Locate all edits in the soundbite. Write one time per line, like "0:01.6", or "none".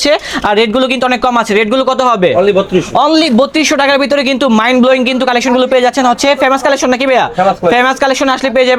none